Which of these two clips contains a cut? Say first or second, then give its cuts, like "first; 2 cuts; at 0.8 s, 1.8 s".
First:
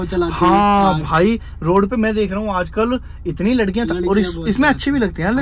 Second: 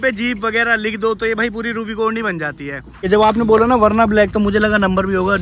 second; 1 cut; at 3.1 s